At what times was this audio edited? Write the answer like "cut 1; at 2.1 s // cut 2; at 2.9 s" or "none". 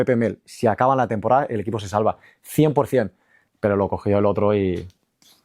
none